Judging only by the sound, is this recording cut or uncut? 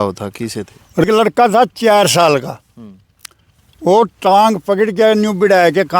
cut